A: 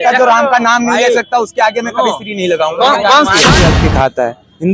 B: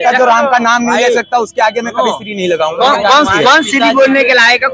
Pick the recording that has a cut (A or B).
A